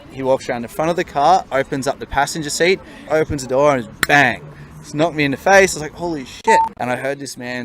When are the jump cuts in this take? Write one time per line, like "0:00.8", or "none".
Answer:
0:03.1
0:06.8